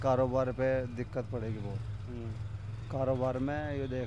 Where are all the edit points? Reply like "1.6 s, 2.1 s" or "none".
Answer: none